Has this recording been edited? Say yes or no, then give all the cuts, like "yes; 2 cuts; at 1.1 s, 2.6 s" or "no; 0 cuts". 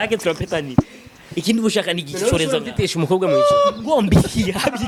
no; 0 cuts